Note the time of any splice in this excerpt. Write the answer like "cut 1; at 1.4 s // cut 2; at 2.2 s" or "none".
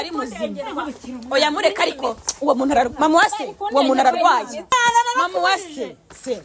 cut 1; at 4.7 s